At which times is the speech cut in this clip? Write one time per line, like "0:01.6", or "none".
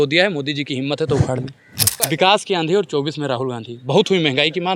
0:02.0